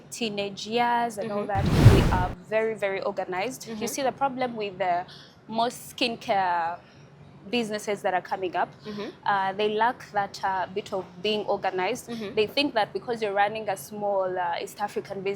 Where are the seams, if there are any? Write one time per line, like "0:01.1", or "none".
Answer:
0:01.9